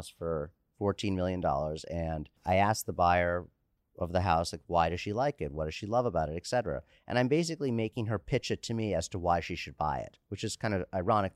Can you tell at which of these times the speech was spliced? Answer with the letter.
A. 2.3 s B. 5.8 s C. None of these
A